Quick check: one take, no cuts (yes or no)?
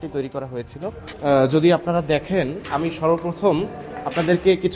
no